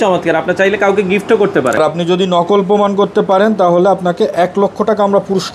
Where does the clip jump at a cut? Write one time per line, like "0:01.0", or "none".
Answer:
0:01.8